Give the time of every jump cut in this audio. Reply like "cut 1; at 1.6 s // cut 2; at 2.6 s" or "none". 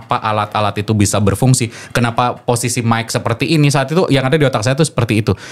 none